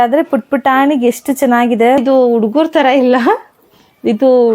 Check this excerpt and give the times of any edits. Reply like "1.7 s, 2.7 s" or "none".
2.0 s

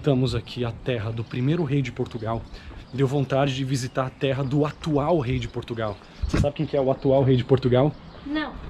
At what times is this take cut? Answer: none

